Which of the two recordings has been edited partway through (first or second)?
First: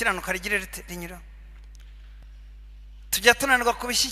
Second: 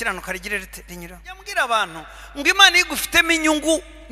second